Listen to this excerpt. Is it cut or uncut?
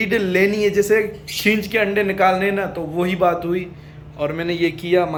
uncut